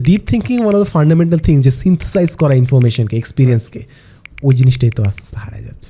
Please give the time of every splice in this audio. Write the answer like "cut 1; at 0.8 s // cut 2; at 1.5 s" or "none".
none